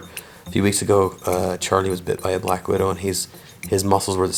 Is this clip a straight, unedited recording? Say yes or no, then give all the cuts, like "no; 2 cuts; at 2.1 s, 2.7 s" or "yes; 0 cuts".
yes; 0 cuts